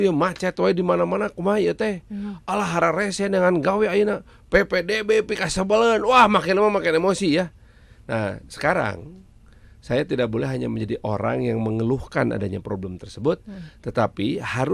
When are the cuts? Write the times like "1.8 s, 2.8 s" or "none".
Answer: none